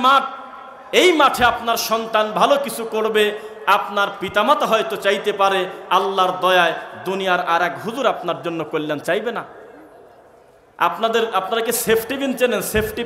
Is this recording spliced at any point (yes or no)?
no